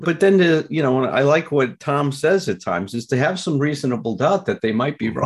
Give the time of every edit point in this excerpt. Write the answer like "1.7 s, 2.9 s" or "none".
none